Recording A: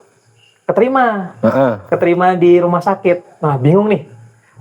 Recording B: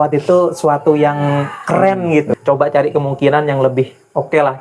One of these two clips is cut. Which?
B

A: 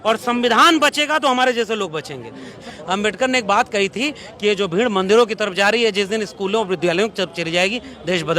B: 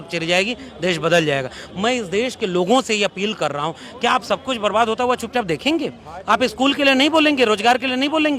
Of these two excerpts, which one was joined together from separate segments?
A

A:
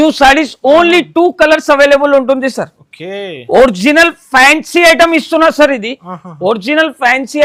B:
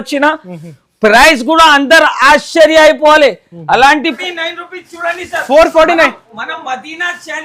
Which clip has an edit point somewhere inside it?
B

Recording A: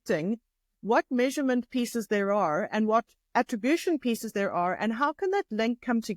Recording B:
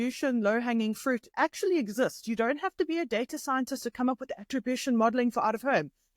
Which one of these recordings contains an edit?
B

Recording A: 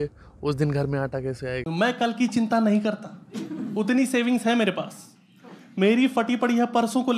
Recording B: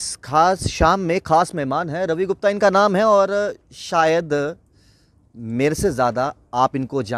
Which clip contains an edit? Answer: A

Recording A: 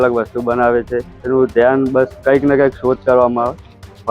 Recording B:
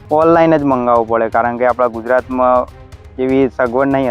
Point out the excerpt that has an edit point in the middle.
A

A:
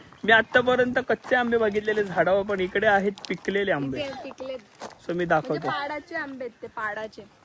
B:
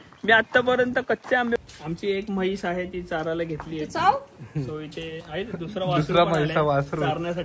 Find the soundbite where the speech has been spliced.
B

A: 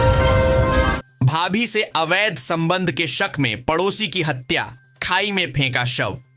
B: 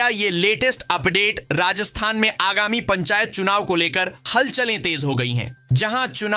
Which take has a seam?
A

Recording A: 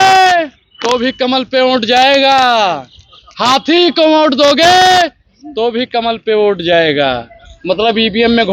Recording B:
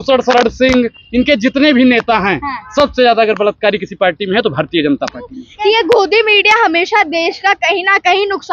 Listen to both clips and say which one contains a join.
B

